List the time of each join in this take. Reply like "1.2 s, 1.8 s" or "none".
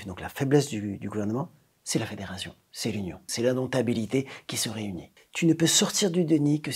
3.3 s